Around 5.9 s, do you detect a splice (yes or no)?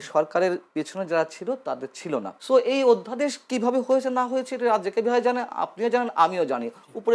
no